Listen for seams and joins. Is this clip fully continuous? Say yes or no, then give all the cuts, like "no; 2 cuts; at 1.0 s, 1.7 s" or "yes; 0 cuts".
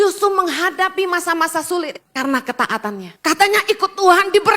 no; 2 cuts; at 2.0 s, 3.1 s